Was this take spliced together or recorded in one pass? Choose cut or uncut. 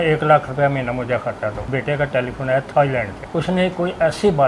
cut